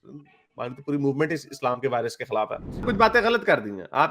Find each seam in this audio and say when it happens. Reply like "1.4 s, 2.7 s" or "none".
2.9 s